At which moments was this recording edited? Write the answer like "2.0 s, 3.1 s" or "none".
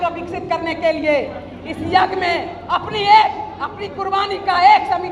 none

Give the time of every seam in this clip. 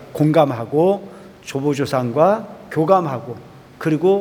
none

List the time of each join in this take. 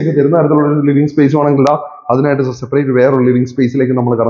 none

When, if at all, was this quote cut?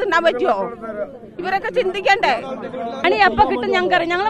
3.0 s

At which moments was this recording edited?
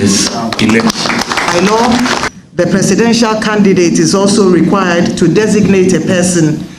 1.5 s

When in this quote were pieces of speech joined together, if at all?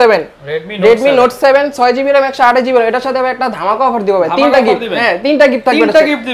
none

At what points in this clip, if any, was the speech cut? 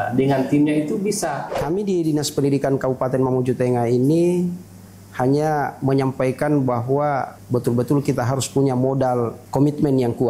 1.5 s, 7.3 s, 9.4 s

